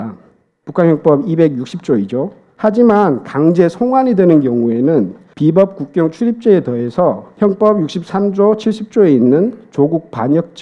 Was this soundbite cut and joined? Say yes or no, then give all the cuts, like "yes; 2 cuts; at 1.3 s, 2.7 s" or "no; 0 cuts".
yes; 3 cuts; at 2.4 s, 5.2 s, 7.3 s